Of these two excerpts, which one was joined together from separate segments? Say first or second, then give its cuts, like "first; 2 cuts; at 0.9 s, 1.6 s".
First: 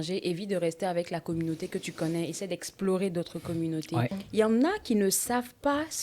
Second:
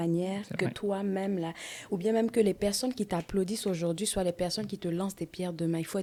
first; 1 cut; at 4.2 s